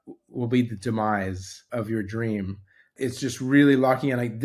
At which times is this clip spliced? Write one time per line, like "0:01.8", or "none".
0:01.6
0:02.9